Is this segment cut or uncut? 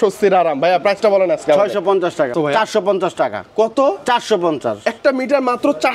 cut